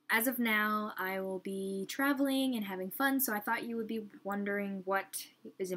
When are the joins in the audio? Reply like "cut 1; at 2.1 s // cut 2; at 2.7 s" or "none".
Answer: none